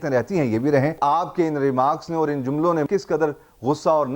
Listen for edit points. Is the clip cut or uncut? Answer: cut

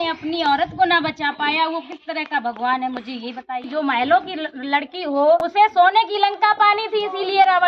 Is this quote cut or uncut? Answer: cut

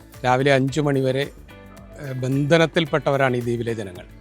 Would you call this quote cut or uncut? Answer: uncut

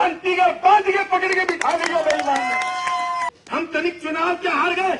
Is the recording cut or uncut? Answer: cut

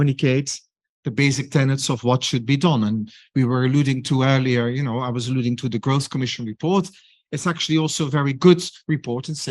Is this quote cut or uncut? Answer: uncut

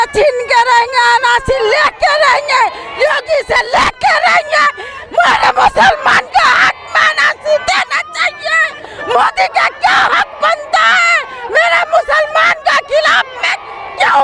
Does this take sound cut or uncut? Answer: uncut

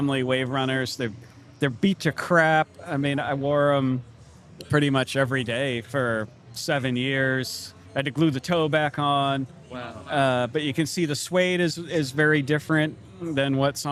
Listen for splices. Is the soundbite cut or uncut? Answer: uncut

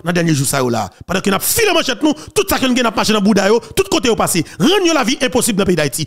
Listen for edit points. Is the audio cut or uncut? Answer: uncut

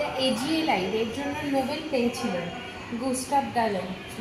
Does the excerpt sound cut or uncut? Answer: uncut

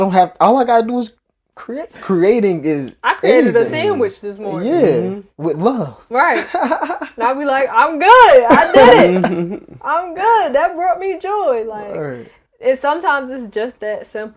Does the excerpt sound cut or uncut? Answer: cut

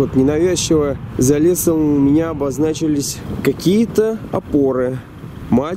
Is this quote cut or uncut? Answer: cut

